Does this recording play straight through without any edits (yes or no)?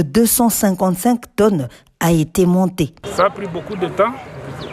no